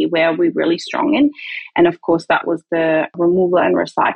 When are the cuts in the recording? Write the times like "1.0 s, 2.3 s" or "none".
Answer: 3.1 s